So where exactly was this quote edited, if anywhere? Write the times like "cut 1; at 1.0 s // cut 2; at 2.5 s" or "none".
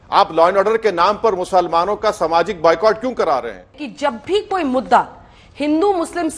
cut 1; at 3.8 s